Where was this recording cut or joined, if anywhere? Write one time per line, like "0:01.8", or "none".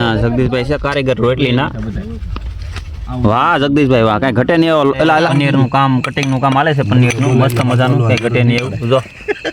0:05.3